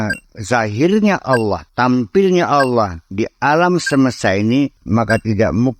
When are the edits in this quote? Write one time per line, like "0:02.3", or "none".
0:01.6
0:04.8